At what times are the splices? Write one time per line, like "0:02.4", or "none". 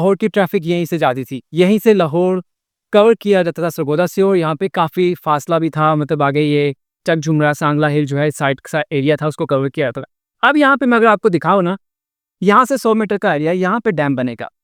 none